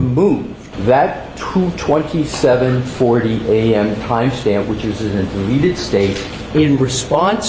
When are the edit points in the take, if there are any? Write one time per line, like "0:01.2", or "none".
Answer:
none

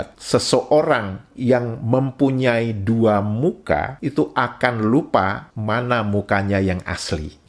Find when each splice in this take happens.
none

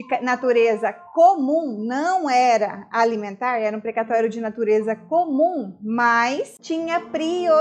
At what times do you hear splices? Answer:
none

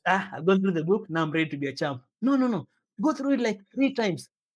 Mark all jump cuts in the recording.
none

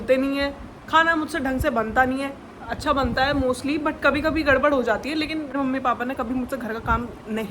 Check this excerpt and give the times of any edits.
0:05.5

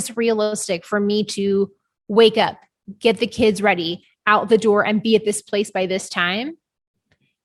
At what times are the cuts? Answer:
none

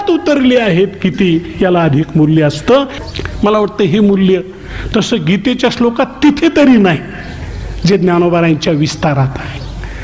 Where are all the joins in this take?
0:03.0

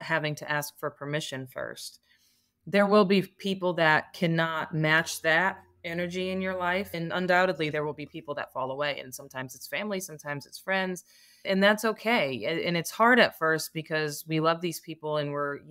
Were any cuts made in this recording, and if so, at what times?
0:06.9
0:11.4

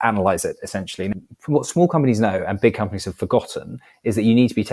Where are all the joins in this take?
0:01.1

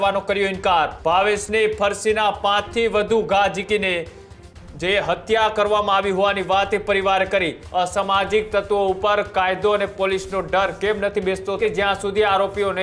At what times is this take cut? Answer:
0:00.9
0:07.6
0:11.6

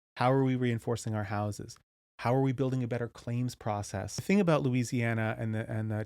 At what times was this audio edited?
0:04.2

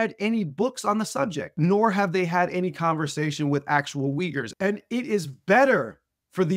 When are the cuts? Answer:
0:01.5
0:04.5

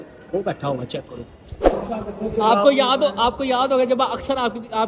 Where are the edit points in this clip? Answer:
0:01.7

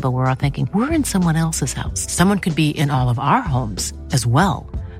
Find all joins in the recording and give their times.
none

